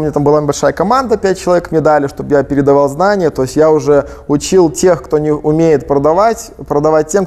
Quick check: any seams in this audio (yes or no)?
no